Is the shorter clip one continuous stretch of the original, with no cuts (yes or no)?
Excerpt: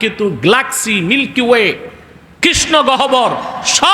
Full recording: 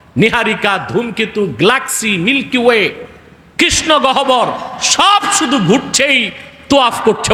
yes